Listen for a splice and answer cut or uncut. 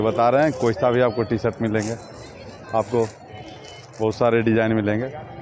uncut